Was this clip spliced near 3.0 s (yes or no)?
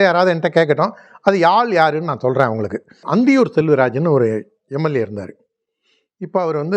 yes